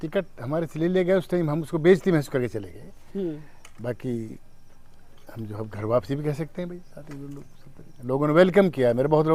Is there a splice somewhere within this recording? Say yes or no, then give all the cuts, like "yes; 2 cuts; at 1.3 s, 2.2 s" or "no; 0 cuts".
no; 0 cuts